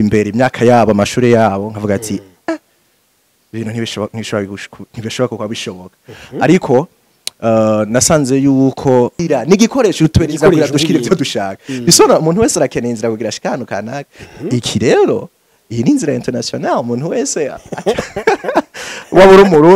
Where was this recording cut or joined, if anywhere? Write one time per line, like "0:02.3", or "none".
0:09.2